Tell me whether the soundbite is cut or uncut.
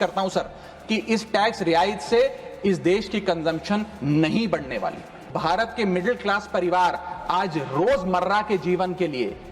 cut